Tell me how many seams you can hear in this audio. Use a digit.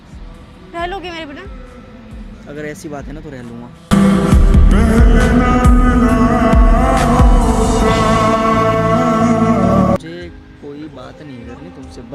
1